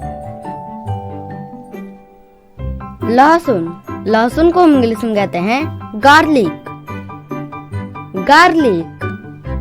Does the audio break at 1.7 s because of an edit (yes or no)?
no